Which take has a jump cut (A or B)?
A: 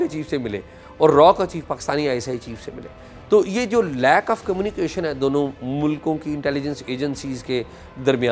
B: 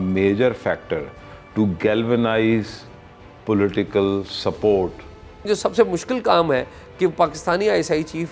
B